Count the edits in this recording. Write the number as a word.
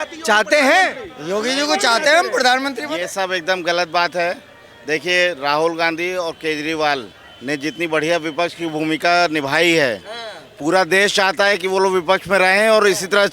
zero